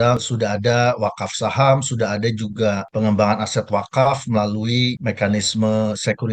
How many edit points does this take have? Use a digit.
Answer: 0